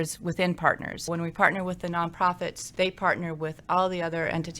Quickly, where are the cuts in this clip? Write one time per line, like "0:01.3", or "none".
0:01.1
0:02.6